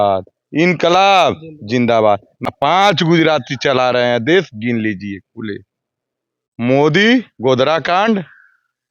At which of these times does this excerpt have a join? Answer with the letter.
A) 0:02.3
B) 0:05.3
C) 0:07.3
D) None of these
A